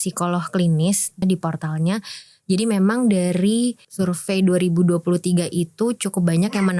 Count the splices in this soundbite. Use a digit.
2